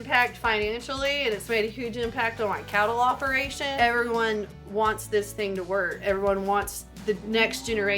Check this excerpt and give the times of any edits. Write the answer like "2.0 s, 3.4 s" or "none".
3.7 s, 5.9 s